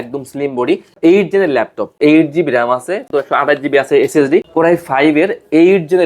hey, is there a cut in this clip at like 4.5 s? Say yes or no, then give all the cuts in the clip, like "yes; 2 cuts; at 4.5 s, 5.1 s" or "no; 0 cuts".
yes; 4 cuts; at 0.9 s, 2.0 s, 3.1 s, 4.5 s